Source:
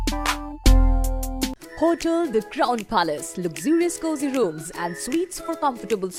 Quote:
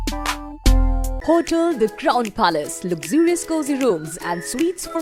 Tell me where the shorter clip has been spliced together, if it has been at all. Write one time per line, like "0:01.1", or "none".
0:01.1